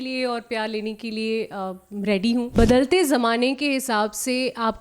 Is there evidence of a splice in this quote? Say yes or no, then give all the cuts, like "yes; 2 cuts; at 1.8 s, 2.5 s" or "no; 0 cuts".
yes; 1 cut; at 2.5 s